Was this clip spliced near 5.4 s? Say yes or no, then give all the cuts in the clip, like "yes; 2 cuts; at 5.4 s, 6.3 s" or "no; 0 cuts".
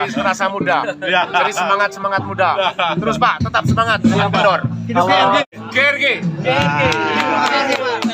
yes; 1 cut; at 5.4 s